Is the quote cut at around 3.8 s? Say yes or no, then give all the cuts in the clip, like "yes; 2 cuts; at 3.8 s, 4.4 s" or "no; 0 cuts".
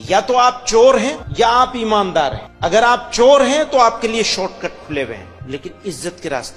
no; 3 cuts; at 1.2 s, 2.4 s, 5.3 s